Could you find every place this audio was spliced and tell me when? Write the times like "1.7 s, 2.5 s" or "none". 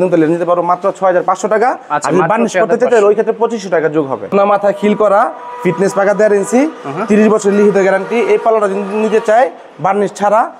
4.3 s